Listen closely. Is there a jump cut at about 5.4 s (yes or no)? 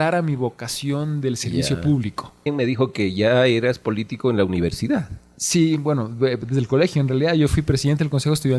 no